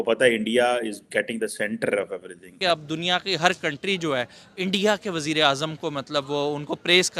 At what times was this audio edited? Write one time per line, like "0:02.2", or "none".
0:02.5

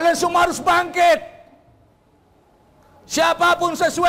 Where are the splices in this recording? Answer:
none

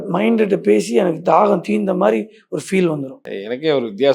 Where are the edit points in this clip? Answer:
0:03.2

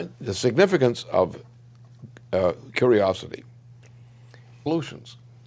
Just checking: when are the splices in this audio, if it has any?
none

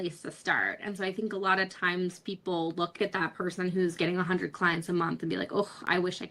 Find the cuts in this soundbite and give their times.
0:03.0

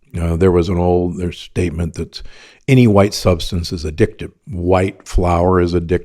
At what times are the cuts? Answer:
0:04.4

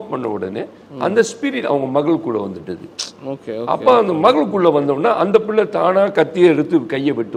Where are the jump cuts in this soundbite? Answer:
none

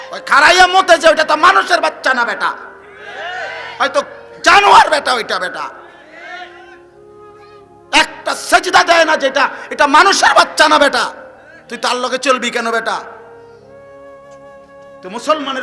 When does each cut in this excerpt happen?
none

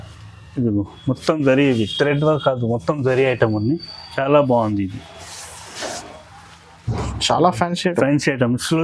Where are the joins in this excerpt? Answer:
none

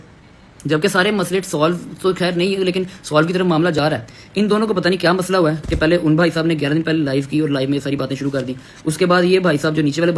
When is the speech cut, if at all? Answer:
none

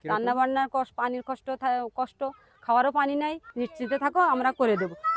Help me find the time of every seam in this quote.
0:03.4

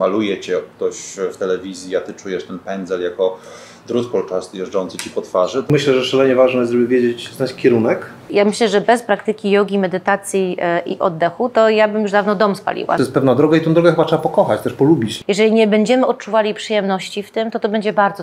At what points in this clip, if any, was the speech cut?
0:05.7
0:08.3
0:13.0
0:15.1

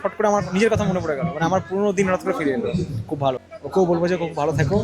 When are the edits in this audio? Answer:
0:03.4

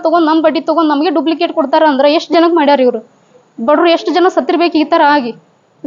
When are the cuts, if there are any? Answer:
none

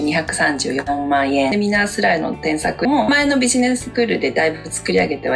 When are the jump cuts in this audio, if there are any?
0:01.5
0:02.8

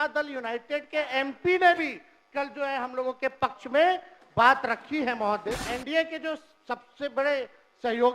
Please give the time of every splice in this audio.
0:05.7

